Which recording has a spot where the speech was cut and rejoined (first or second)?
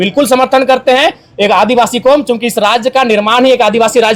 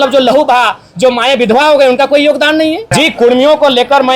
second